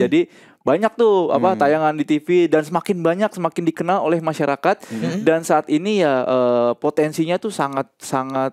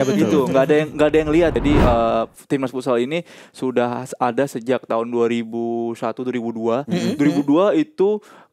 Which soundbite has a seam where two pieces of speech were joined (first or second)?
second